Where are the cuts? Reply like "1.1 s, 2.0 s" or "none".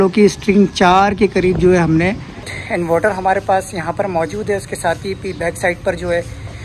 2.6 s